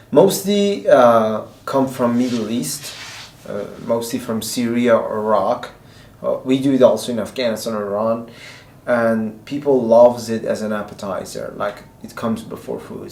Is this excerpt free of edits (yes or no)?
yes